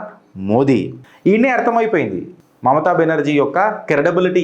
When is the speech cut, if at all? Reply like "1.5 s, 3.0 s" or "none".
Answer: 1.0 s